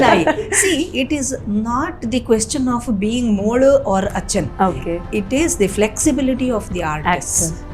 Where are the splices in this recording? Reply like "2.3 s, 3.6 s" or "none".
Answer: none

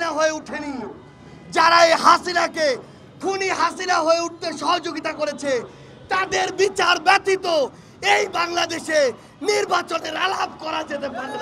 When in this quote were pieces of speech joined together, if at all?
none

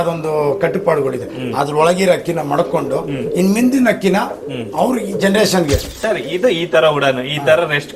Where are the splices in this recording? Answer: 5.9 s

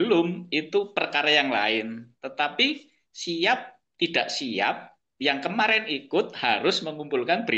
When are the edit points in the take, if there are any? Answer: none

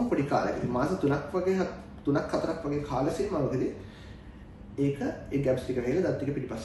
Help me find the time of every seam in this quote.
none

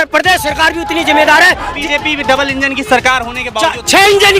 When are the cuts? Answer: 1.8 s

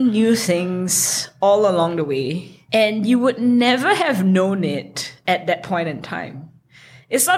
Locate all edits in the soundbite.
none

